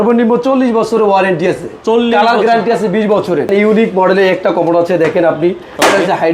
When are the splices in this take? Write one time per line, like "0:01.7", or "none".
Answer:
0:03.5